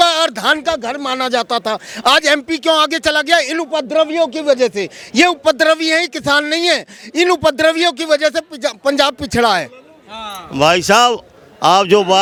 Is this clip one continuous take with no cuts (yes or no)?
yes